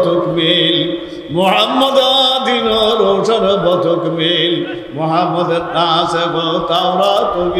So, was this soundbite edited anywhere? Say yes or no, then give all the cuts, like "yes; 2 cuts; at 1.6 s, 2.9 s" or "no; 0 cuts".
no; 0 cuts